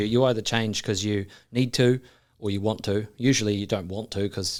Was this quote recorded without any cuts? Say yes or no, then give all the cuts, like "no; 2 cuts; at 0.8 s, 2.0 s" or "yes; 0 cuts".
yes; 0 cuts